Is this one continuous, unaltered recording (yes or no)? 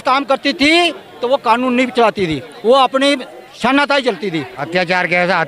no